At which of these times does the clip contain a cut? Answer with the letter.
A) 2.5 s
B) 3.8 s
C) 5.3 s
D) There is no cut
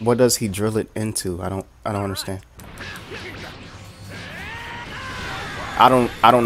A